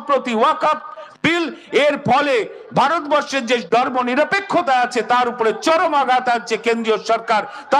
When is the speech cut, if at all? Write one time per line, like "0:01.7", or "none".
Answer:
none